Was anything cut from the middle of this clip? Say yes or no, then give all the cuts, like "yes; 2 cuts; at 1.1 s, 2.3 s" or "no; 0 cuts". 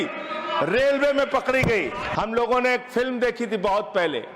yes; 1 cut; at 2.0 s